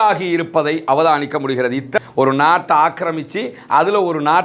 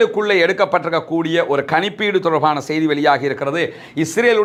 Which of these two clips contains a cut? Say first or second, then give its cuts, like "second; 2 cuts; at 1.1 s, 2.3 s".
first; 1 cut; at 2.0 s